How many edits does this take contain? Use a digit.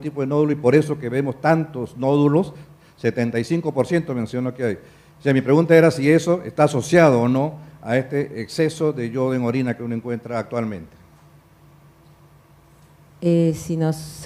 0